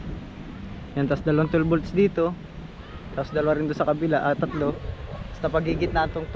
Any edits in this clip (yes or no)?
no